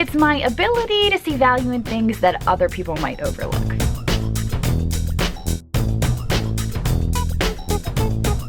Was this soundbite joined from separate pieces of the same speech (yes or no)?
no